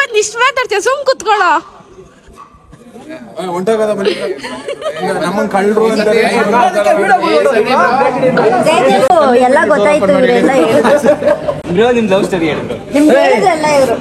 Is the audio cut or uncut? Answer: uncut